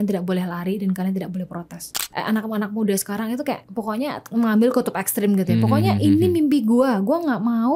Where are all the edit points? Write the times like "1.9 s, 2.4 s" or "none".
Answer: 1.9 s, 3.7 s